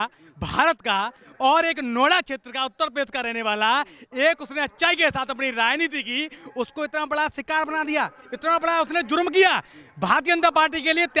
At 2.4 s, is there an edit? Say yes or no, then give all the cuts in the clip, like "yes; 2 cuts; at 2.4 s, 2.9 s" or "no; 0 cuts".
no; 0 cuts